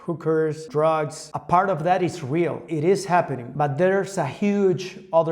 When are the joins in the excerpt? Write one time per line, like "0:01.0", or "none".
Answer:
0:01.2
0:02.6
0:03.4